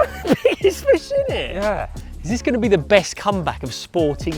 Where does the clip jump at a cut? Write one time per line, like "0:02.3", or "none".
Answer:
0:02.0